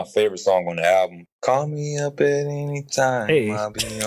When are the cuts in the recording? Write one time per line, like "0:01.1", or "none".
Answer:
0:01.2